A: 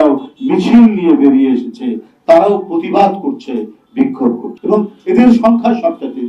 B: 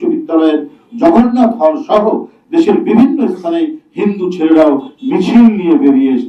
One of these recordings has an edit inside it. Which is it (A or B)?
A